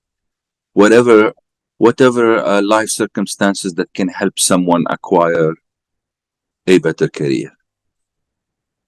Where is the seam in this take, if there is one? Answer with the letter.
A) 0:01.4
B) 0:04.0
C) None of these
A